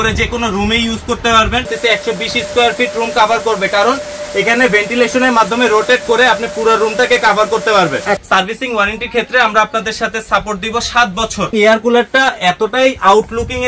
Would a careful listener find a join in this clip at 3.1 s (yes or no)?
no